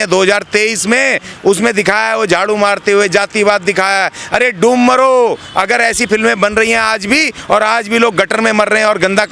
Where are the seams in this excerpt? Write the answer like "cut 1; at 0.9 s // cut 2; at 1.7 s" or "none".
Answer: cut 1; at 1.3 s